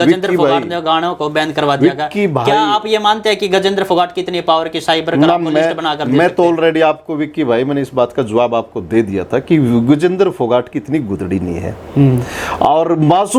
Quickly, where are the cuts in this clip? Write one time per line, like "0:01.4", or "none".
none

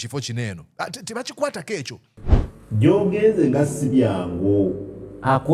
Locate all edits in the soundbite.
0:02.2

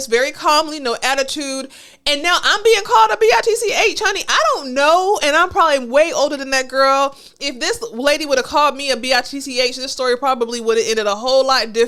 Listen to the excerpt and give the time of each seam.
none

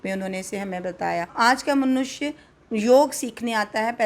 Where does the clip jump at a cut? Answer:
0:01.3

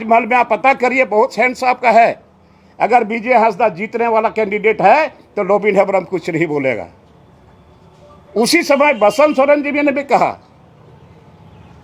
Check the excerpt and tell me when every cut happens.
none

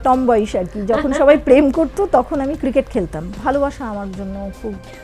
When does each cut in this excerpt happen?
0:03.3

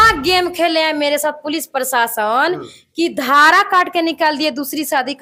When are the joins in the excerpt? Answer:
none

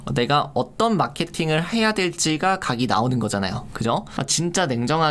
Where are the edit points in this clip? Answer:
0:04.1

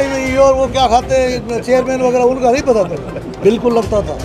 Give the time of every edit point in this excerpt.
0:03.3

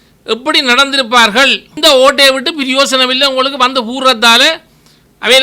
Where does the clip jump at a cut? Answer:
0:01.8

